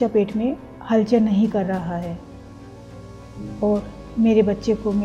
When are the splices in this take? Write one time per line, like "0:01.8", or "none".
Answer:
none